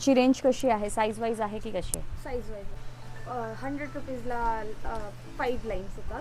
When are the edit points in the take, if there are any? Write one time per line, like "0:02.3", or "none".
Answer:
0:02.8